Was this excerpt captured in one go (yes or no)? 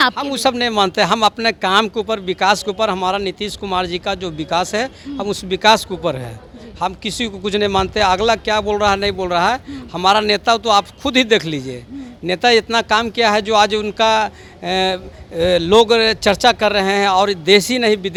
yes